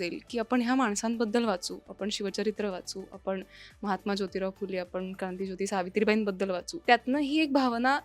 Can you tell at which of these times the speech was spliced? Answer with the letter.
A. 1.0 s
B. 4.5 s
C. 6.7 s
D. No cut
C